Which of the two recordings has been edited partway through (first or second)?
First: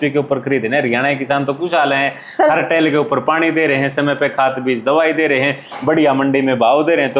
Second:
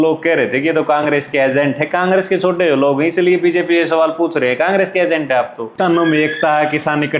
second